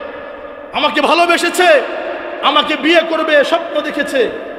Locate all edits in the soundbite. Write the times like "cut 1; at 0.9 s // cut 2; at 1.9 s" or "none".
none